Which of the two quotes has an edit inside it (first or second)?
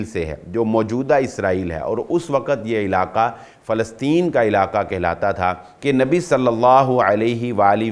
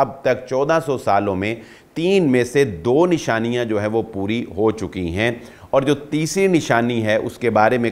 first